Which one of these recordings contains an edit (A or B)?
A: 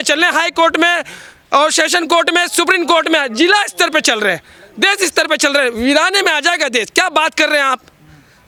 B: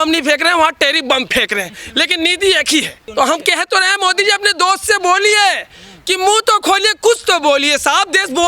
B